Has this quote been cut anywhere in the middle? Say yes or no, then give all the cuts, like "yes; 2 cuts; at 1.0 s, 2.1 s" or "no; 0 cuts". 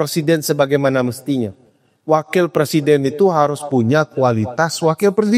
no; 0 cuts